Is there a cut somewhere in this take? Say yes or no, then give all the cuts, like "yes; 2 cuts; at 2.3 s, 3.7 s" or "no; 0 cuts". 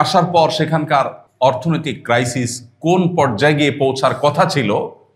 yes; 1 cut; at 1.2 s